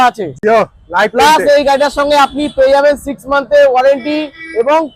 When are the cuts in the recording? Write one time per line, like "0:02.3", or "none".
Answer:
none